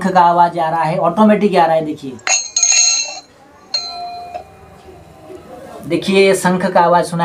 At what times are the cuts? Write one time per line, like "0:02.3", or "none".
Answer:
none